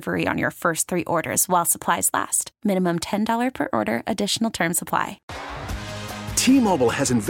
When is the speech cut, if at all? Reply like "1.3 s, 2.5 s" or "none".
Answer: 5.3 s

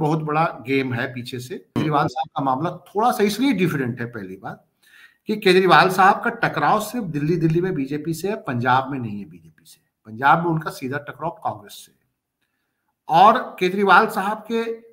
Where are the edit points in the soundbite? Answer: 1.8 s

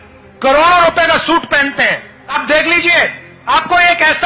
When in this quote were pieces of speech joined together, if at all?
2.3 s, 3.3 s

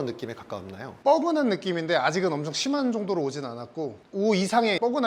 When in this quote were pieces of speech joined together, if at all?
none

